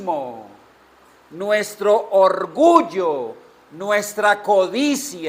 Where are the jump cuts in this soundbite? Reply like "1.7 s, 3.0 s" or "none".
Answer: none